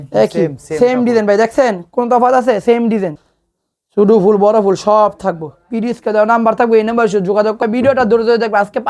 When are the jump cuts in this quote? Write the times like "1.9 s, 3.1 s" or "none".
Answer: 3.1 s, 7.6 s

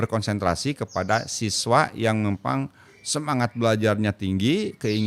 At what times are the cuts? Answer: none

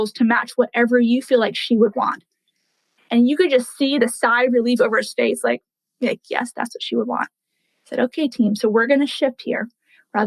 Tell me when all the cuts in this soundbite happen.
none

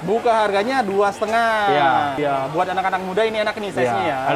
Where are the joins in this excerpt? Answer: 2.2 s

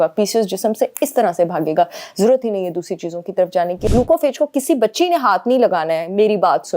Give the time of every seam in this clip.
3.9 s

